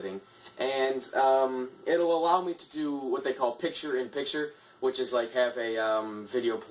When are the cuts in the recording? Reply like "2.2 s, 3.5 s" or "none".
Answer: none